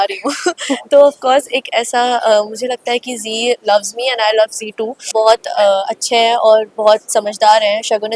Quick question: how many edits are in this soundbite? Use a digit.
1